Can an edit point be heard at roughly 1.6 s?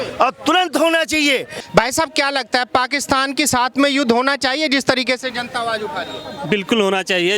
yes; 1 cut; at 1.6 s

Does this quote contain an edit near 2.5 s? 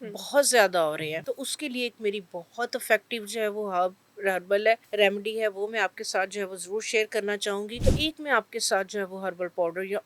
no; 3 cuts; at 1.2 s, 4.9 s, 7.7 s

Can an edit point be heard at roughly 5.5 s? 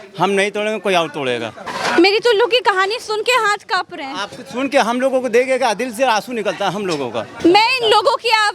no; 2 cuts; at 1.6 s, 7.3 s

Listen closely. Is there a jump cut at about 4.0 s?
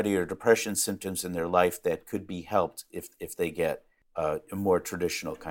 yes; 1 cut; at 4.0 s

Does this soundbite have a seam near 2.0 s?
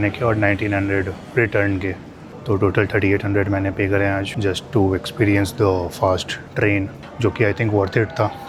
no; 0 cuts

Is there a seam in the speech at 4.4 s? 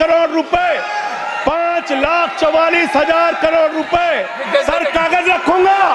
yes; 1 cut; at 4.4 s

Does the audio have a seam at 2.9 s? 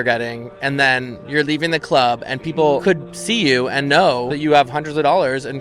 yes; 2 cuts; at 2.9 s, 4.3 s

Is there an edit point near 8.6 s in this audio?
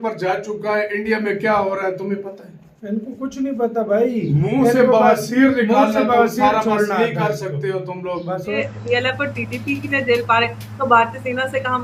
yes; 1 cut; at 8.6 s

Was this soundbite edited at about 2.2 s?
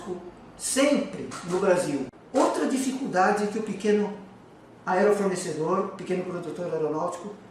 yes; 1 cut; at 2.2 s

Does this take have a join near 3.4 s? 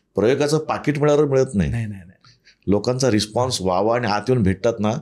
no; 0 cuts

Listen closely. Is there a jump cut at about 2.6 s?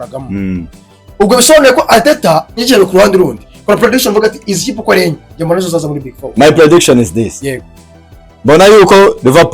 yes; 1 cut; at 2.6 s

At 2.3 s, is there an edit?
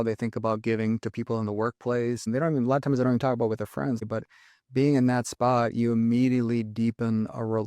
yes; 2 cuts; at 2.3 s, 4.0 s

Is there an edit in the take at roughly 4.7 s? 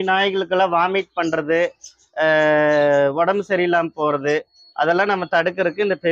no; 0 cuts

